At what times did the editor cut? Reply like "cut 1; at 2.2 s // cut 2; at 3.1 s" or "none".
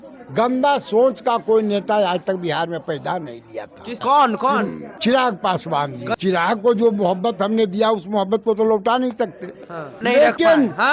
cut 1; at 4.0 s // cut 2; at 4.8 s // cut 3; at 6.1 s // cut 4; at 10.0 s